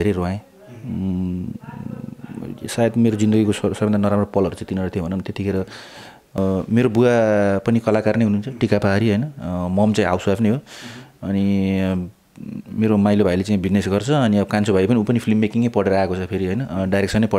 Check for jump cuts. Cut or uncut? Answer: cut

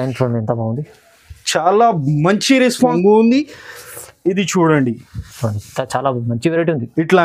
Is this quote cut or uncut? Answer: cut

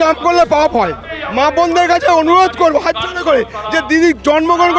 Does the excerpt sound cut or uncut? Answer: cut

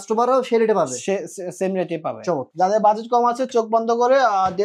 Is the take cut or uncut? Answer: cut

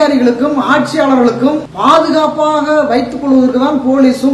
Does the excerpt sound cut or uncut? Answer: cut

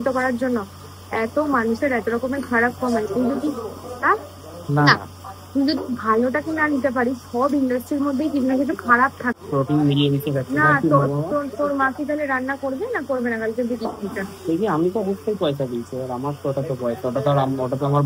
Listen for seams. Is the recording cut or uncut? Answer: cut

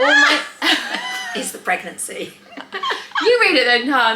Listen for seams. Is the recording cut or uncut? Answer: uncut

